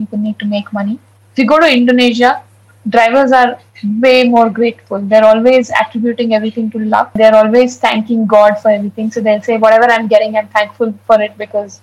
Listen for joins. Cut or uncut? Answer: cut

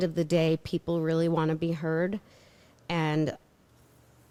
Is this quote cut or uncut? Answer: uncut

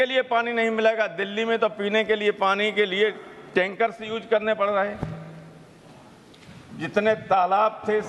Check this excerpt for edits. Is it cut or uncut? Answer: uncut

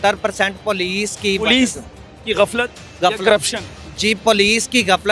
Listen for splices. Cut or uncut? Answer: uncut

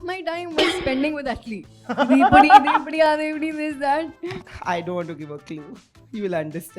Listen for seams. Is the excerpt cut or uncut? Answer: cut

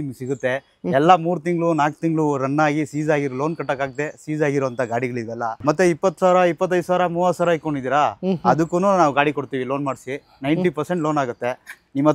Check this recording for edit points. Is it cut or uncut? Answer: cut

